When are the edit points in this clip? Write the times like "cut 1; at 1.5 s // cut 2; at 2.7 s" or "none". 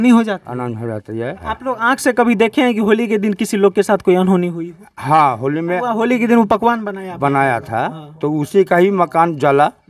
cut 1; at 1.4 s // cut 2; at 5.8 s